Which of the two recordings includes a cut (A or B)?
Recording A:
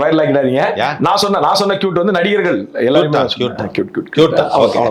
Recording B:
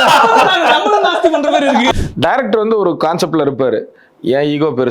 B